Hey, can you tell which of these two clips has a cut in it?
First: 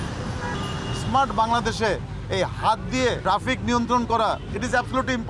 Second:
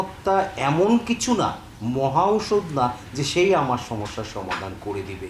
first; 2 cuts; at 0.9 s, 3.2 s

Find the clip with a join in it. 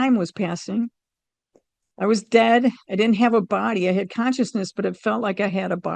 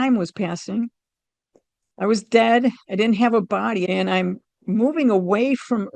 second; 1 cut; at 3.8 s

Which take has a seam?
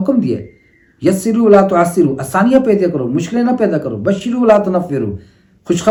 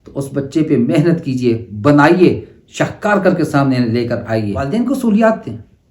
second; 1 cut; at 4.6 s

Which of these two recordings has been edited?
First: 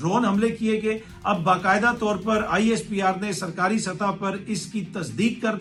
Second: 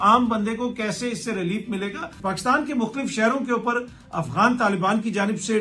second; 1 cut; at 2.1 s

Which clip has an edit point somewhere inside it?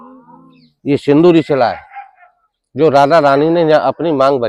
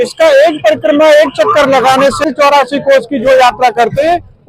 second; 1 cut; at 2.2 s

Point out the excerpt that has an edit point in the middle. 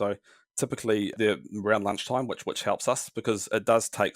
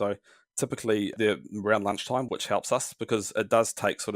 second; 1 cut; at 2.3 s

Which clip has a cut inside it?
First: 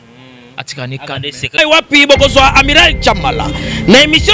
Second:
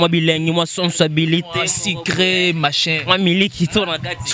first; 1 cut; at 1.5 s

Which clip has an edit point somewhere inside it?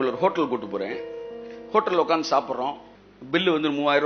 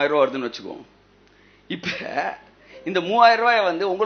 first; 1 cut; at 2.9 s

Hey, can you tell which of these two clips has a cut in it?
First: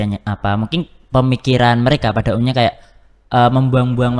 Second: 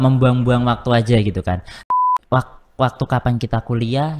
second; 1 cut; at 1.8 s

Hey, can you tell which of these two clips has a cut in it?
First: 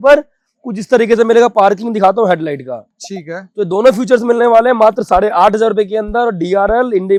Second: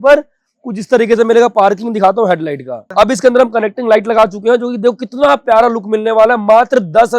second; 1 cut; at 2.8 s

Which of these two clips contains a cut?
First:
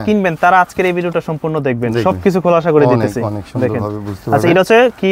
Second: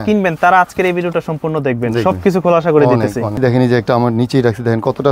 second; 1 cut; at 3.4 s

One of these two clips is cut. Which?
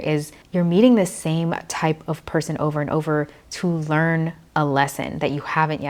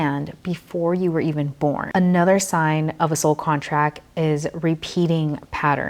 second; 1 cut; at 1.8 s

